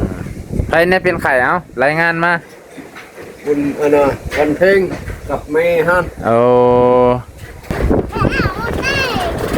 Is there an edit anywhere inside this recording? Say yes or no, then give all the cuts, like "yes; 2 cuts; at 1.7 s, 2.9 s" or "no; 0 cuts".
yes; 1 cut; at 7.6 s